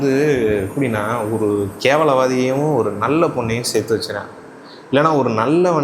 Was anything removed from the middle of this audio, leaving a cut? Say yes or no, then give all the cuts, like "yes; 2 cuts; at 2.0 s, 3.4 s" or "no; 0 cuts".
yes; 1 cut; at 1.7 s